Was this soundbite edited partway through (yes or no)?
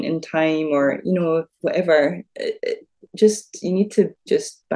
no